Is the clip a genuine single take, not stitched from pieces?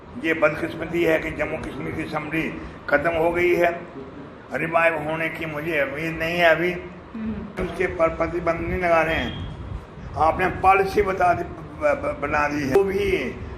no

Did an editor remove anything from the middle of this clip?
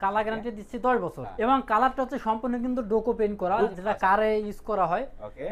yes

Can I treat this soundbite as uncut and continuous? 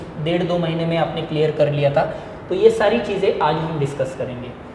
yes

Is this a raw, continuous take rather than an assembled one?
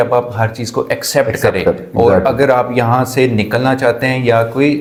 yes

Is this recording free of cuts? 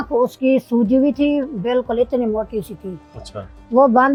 yes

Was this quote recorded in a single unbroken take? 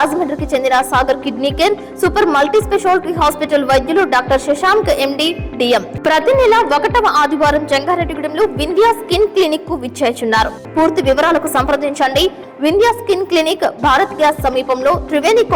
no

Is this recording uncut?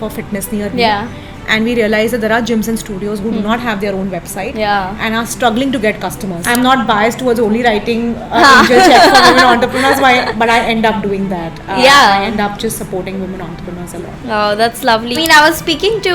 no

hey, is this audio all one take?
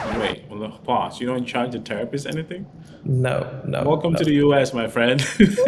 yes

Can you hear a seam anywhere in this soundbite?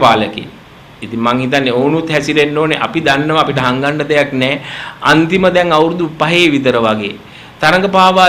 no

